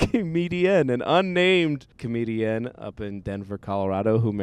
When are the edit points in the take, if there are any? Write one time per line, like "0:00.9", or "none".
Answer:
0:02.0